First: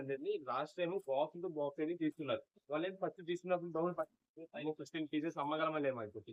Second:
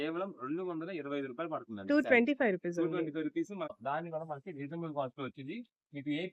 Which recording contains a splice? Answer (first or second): second